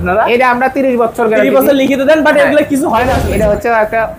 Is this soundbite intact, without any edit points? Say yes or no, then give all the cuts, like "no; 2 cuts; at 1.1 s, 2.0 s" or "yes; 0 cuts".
no; 1 cut; at 3.2 s